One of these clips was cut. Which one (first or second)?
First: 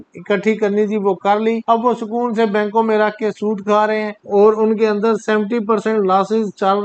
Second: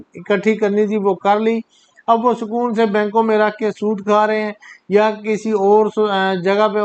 first